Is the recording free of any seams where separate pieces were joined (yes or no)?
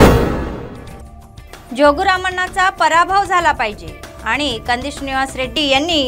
yes